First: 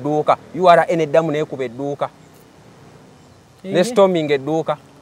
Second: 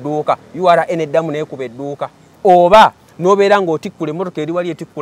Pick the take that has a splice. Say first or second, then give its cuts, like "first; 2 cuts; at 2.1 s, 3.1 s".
second; 1 cut; at 2.2 s